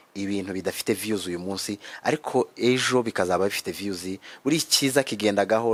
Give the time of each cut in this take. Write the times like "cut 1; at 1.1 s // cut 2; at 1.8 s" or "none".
none